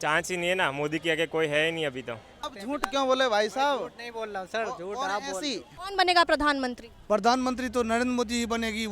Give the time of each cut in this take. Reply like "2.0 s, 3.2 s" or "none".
2.4 s, 5.7 s